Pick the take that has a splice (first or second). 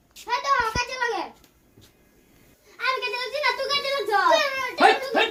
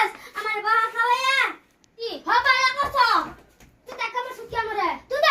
second